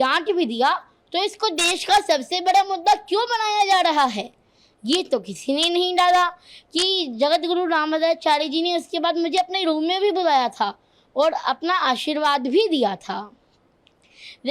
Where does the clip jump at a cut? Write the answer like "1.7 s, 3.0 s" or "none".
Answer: none